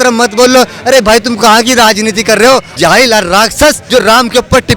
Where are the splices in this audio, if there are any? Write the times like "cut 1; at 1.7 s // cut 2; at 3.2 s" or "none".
cut 1; at 2.7 s // cut 2; at 3.8 s